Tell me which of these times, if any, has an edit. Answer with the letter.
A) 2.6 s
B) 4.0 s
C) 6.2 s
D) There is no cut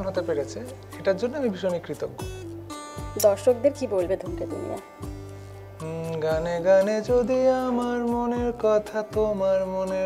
D